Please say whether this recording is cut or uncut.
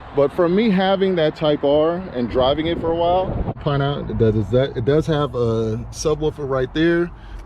cut